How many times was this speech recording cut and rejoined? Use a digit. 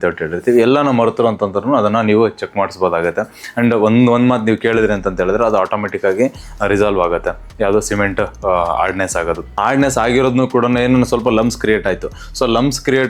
0